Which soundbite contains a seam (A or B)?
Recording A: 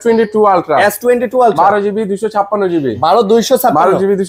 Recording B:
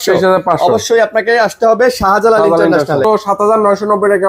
B